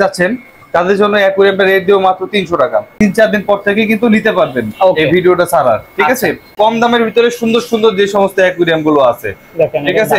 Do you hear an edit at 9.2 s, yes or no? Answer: no